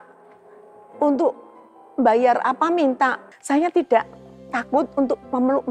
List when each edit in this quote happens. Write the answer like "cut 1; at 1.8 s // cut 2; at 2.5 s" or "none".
cut 1; at 3.3 s